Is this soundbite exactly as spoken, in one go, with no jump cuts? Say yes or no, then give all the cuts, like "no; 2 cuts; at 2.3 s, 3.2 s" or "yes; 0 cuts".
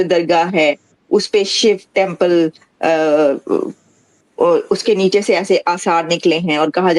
yes; 0 cuts